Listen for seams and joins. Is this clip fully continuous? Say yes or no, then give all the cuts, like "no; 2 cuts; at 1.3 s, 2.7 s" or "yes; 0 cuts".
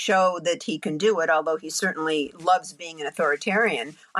yes; 0 cuts